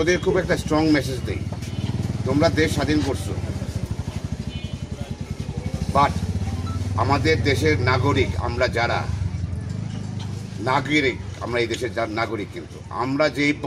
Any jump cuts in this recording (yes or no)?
no